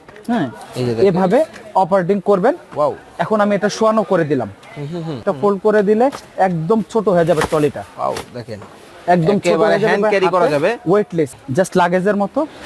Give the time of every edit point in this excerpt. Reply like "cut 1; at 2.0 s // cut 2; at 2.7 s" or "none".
cut 1; at 5.2 s // cut 2; at 11.3 s